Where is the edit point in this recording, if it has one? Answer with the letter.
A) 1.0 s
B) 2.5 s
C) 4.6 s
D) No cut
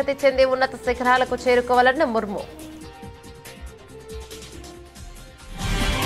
B